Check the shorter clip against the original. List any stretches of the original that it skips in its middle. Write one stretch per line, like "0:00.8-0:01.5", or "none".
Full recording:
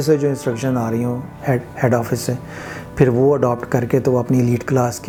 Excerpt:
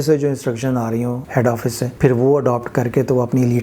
0:01.4-0:02.4